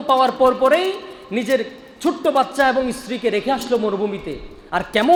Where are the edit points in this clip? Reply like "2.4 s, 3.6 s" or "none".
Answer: none